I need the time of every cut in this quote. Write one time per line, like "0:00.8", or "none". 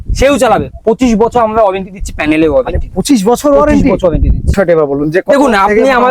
0:04.5